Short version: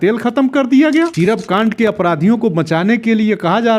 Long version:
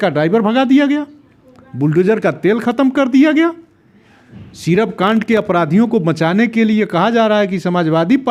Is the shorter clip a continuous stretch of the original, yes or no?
no